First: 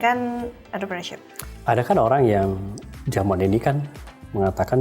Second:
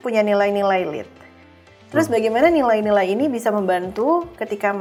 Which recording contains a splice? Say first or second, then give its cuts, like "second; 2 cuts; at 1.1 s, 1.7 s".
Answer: first; 1 cut; at 1.4 s